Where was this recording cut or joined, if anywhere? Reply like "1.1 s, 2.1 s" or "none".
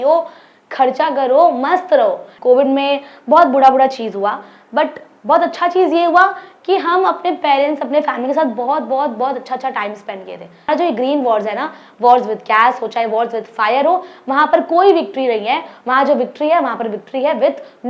2.3 s, 10.7 s

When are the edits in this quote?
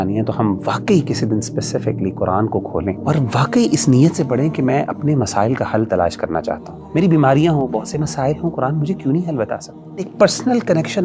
3.0 s, 6.7 s, 10.1 s

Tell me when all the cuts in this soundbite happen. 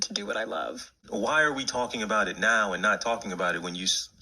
1.0 s

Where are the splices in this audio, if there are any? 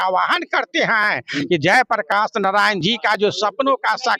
none

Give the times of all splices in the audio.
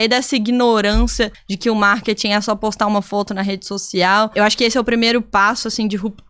1.4 s, 4.3 s

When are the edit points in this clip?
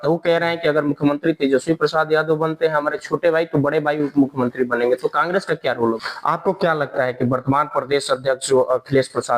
6.0 s

